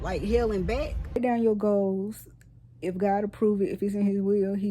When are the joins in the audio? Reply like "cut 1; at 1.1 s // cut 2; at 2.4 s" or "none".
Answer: cut 1; at 1.2 s

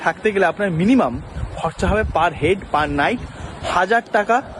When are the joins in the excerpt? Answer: none

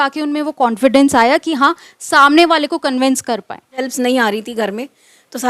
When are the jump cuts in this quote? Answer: cut 1; at 3.9 s

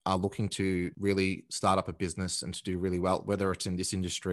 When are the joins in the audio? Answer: cut 1; at 0.9 s

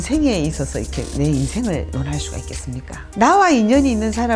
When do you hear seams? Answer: cut 1; at 3.0 s

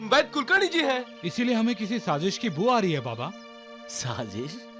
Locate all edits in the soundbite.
none

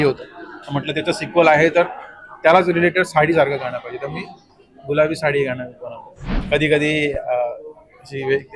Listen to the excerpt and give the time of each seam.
cut 1; at 6.3 s

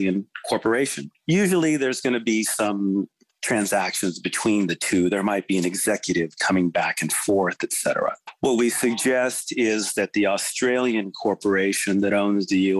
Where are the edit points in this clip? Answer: cut 1; at 1.1 s // cut 2; at 8.3 s

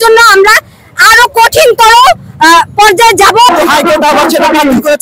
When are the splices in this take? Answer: cut 1; at 3.5 s

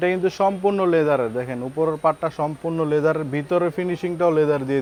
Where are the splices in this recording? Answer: none

